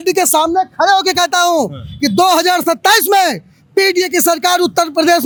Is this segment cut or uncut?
uncut